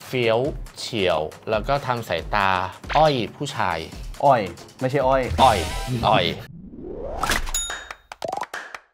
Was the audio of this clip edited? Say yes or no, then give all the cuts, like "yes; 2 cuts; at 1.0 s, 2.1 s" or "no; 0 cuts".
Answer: yes; 1 cut; at 6.4 s